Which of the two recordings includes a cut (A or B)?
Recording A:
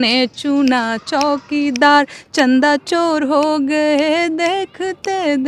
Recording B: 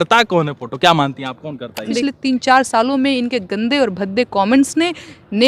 B